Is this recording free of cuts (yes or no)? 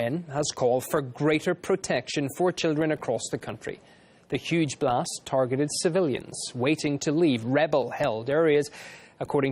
no